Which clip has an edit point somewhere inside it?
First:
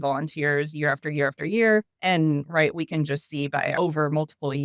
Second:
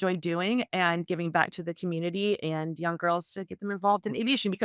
first; 2 cuts; at 1.9 s, 3.7 s

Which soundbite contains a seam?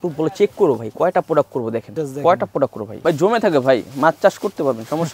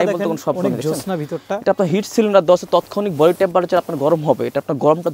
first; 2 cuts; at 1.9 s, 2.9 s

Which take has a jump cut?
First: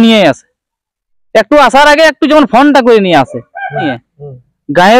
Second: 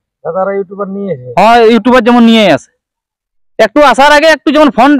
first; 1 cut; at 3.9 s

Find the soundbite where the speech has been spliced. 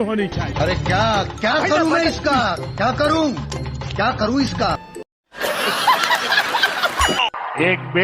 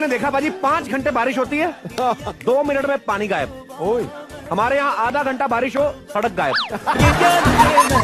first; 2 cuts; at 5.1 s, 7.2 s

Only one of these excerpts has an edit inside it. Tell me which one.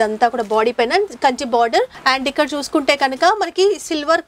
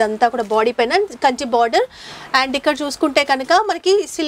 first; 1 cut; at 2.0 s

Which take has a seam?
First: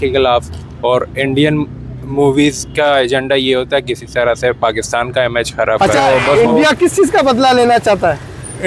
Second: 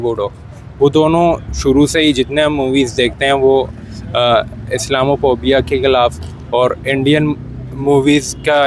first; 1 cut; at 5.8 s

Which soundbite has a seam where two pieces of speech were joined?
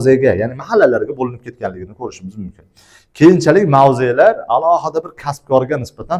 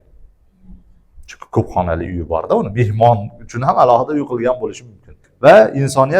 second; 1 cut; at 5.2 s

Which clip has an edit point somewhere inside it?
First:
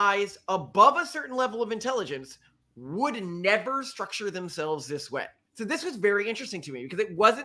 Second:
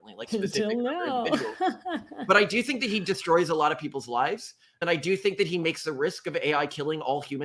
first; 1 cut; at 5.6 s

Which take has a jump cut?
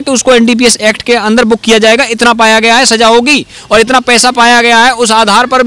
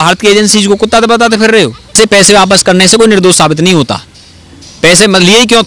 second; 1 cut; at 2.0 s

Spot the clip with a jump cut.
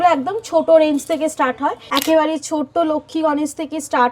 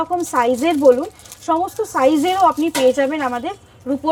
first; 1 cut; at 1.8 s

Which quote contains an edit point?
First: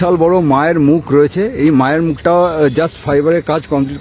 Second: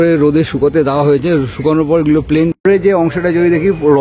second; 1 cut; at 2.6 s

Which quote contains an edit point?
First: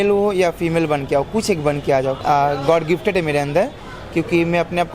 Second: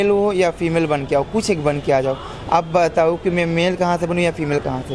first; 1 cut; at 2.2 s

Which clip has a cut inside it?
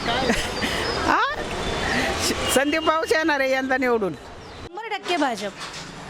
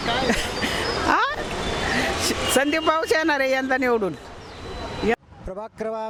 first; 1 cut; at 4.7 s

